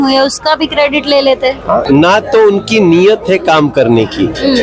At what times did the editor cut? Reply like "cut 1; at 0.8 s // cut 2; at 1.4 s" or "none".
cut 1; at 1.9 s